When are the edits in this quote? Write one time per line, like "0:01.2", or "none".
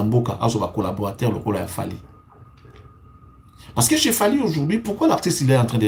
none